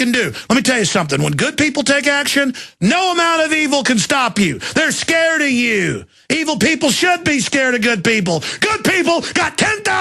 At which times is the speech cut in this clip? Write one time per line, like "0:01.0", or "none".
none